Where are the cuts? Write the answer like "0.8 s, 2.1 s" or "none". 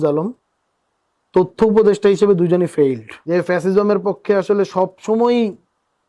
3.1 s